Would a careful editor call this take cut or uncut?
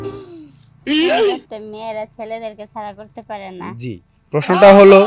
cut